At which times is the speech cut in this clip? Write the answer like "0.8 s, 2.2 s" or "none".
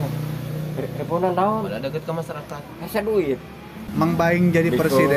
3.9 s